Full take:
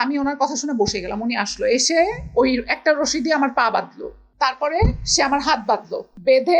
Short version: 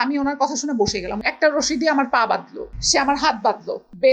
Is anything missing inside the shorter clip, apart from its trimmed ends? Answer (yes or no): yes